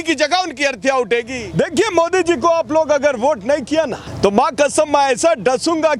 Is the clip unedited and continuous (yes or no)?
no